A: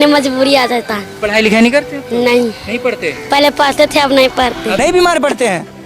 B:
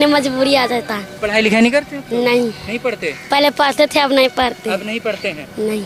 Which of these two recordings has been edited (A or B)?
A